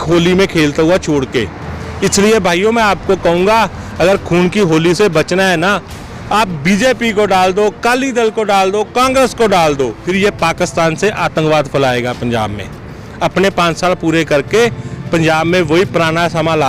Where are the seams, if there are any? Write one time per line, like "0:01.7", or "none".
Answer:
0:10.0